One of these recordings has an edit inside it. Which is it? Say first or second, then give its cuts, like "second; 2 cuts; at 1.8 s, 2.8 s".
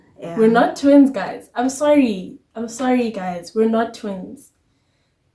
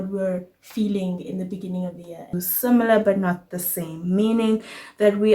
second; 1 cut; at 2.3 s